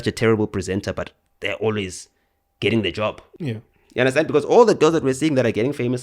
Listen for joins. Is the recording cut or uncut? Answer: cut